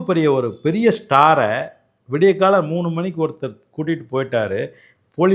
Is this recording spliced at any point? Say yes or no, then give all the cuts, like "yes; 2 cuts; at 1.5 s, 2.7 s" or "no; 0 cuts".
no; 0 cuts